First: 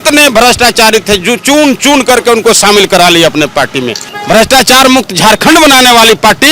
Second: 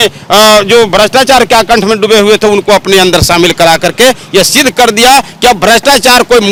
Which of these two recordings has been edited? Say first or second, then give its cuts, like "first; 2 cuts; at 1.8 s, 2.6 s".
first; 1 cut; at 4.0 s